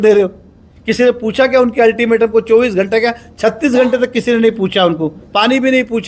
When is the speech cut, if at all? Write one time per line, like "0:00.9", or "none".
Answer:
none